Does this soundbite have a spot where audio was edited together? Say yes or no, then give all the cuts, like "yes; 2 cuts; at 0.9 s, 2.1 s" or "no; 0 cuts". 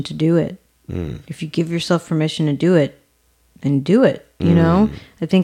no; 0 cuts